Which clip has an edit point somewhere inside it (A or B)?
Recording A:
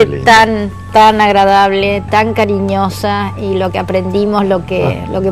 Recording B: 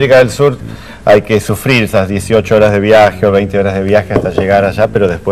B